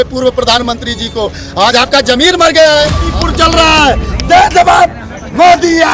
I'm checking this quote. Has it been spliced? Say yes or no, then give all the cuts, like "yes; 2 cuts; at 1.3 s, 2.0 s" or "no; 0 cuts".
yes; 1 cut; at 3.0 s